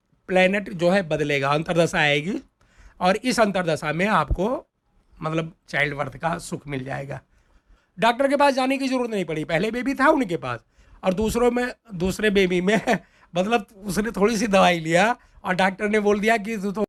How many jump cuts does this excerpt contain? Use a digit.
0